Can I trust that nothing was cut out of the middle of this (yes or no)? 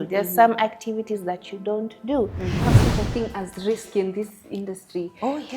no